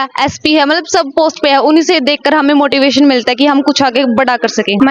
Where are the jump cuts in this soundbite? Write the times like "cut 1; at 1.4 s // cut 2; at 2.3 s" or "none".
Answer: none